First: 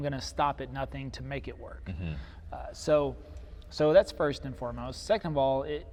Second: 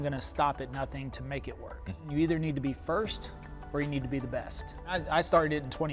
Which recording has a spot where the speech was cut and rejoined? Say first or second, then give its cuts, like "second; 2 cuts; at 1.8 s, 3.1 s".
second; 2 cuts; at 2.0 s, 4.9 s